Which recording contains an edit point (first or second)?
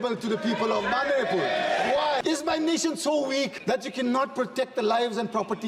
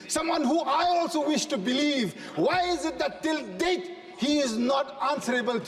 first